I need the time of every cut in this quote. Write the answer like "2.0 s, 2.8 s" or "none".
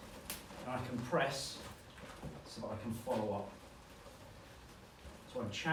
none